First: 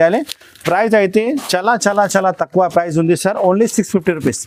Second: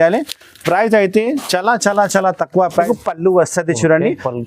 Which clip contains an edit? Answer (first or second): second